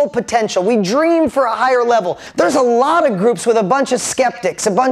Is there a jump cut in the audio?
yes; 1 cut; at 2.2 s

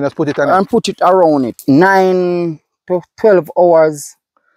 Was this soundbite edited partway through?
yes; 1 cut; at 1.5 s

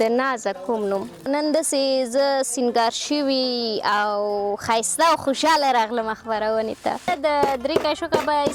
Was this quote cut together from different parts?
yes; 2 cuts; at 1.6 s, 7.1 s

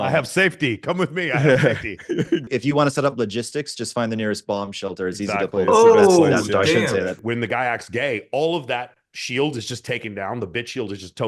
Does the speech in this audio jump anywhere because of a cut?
yes; 2 cuts; at 2.5 s, 7.2 s

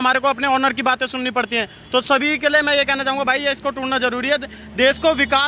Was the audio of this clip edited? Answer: no; 0 cuts

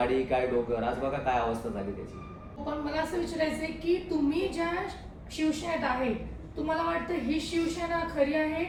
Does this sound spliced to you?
no; 0 cuts

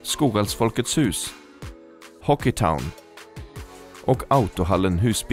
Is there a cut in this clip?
no; 0 cuts

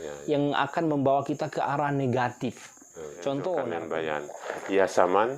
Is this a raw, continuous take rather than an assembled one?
no; 1 cut; at 3.8 s

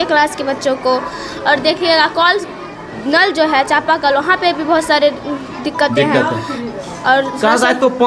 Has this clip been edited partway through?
no; 0 cuts

